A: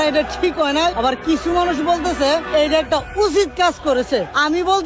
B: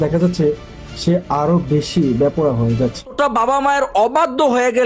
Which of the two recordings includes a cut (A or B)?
B